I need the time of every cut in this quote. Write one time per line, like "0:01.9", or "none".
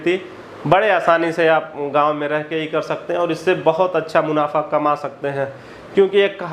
none